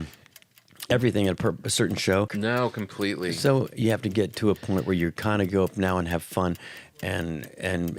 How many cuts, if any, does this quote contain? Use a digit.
1